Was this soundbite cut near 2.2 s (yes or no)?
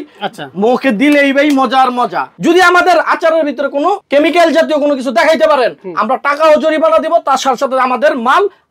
yes